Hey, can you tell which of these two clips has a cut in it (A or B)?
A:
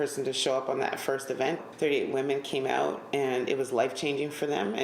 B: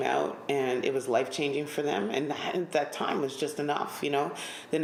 A